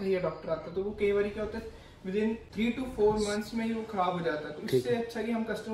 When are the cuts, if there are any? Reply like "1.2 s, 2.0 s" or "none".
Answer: 2.5 s